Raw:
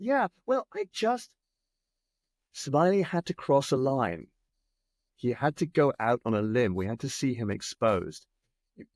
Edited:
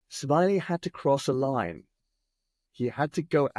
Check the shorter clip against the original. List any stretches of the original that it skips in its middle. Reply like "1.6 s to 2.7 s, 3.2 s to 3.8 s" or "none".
none